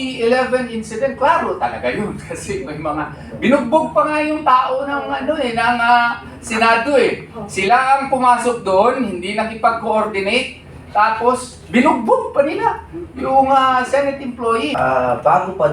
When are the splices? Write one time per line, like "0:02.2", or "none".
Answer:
0:14.7